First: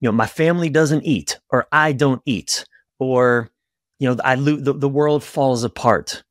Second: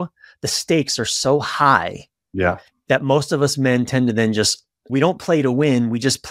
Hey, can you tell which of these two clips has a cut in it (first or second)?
second